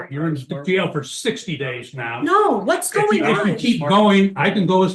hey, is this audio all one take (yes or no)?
yes